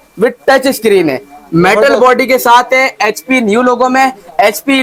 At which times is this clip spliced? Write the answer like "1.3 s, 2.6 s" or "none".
none